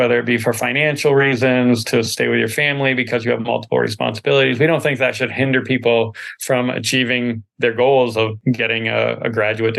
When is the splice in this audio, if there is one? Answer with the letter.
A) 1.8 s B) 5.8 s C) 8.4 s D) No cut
C